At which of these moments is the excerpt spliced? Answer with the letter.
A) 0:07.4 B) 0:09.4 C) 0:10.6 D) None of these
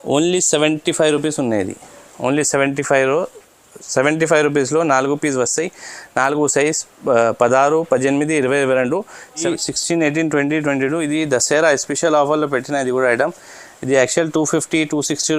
B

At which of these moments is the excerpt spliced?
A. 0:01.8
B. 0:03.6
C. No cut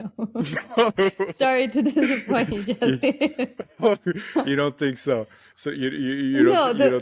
C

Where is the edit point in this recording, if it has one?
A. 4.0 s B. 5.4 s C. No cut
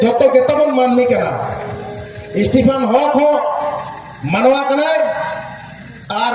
C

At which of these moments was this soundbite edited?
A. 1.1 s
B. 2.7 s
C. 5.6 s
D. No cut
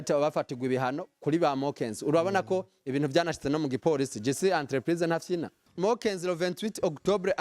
C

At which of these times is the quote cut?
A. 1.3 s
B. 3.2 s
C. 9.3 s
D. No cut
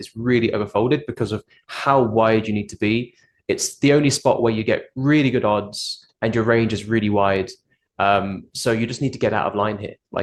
D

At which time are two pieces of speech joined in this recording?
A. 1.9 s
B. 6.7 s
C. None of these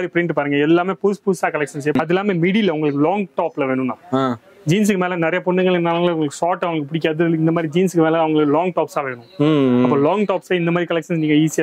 A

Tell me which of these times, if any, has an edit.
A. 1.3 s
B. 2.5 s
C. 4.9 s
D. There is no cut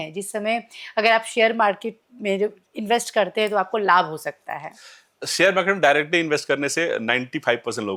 D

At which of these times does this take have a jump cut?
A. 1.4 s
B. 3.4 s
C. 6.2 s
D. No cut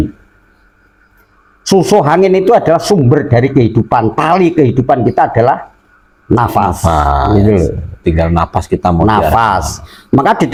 D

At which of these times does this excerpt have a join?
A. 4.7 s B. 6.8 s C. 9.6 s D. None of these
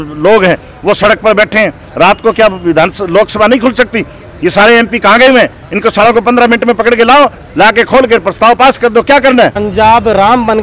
C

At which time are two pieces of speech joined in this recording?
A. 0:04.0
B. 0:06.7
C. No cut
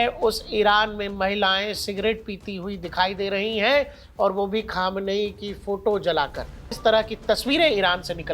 B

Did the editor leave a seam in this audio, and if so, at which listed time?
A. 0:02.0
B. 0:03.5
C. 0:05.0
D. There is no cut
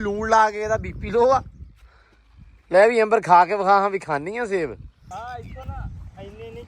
C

